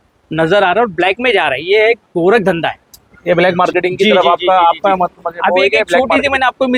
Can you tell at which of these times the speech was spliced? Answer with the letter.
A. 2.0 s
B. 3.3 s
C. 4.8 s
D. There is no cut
D